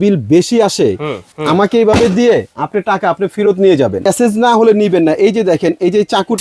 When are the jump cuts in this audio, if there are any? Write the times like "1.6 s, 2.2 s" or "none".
1.3 s, 4.0 s